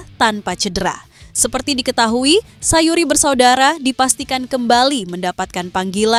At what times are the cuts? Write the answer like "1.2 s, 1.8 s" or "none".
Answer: none